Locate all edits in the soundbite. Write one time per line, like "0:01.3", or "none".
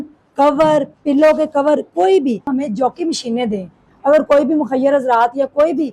0:02.5